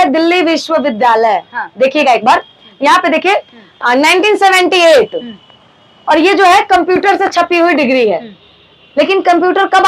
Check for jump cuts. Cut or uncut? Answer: uncut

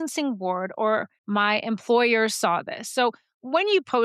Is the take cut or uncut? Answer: cut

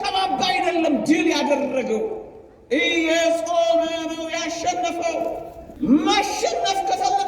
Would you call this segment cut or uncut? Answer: cut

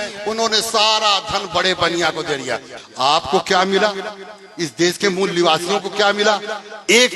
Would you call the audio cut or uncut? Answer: cut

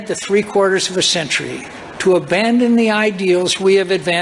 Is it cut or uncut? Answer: uncut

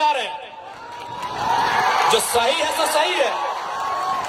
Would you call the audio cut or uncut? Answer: uncut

